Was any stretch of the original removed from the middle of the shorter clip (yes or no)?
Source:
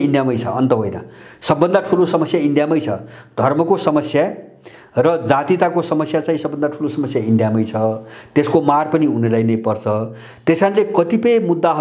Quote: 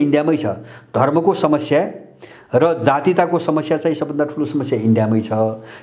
no